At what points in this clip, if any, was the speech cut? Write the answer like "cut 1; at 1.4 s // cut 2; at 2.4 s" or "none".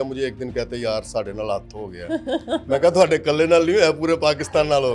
none